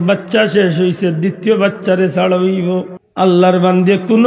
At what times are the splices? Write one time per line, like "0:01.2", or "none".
0:03.0